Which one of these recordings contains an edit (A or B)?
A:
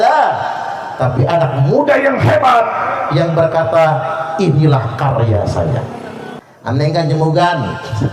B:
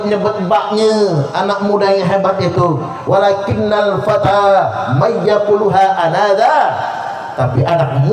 A